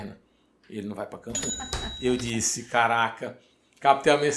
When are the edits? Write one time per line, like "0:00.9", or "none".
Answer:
0:01.6